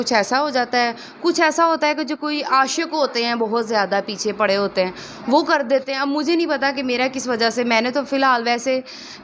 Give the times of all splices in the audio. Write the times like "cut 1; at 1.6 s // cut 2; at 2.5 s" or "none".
none